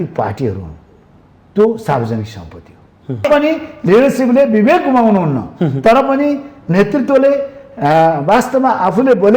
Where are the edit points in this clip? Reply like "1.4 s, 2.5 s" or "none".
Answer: 3.3 s